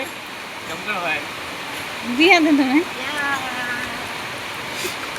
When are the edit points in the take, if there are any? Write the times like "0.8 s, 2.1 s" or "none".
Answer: none